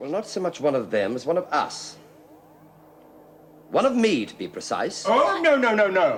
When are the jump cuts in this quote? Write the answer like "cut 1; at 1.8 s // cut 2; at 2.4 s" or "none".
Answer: none

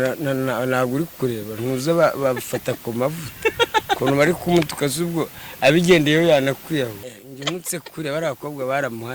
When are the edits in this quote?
cut 1; at 7.0 s

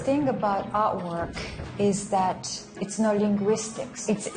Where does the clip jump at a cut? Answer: cut 1; at 2.8 s

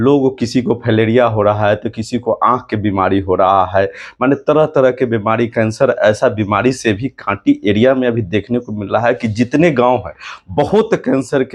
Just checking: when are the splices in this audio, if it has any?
none

